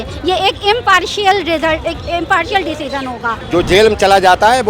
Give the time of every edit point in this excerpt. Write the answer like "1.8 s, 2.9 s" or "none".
3.4 s